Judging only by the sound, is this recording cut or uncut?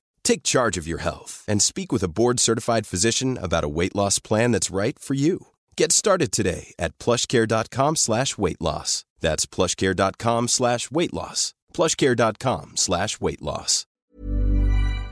cut